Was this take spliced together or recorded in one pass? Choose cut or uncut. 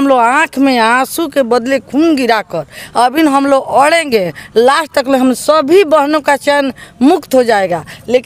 uncut